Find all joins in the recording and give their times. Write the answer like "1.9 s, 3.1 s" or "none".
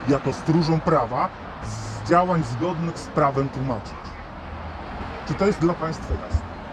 none

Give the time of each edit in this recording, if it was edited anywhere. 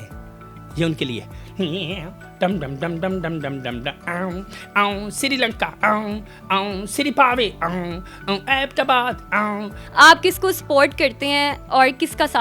9.8 s

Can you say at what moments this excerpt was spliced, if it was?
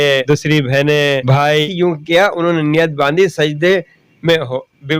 1.7 s

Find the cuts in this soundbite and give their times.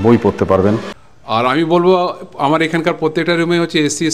0.9 s

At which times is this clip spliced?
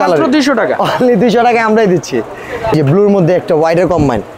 2.7 s

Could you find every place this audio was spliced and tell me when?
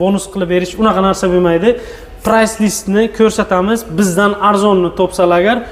none

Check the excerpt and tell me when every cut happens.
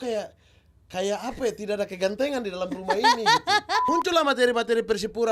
3.8 s

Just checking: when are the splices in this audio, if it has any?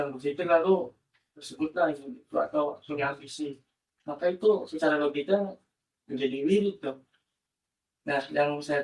none

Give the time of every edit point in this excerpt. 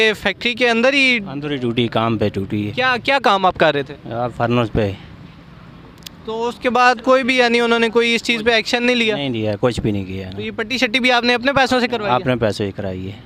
none

